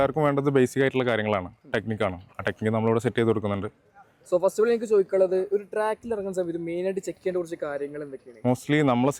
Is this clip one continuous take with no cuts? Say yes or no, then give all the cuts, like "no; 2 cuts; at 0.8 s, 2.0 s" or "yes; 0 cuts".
yes; 0 cuts